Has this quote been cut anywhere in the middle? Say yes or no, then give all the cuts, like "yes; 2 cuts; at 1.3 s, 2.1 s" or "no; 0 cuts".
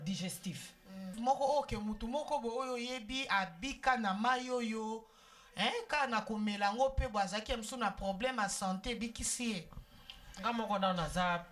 yes; 1 cut; at 1.1 s